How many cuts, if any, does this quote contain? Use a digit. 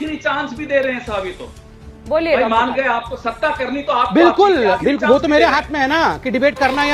0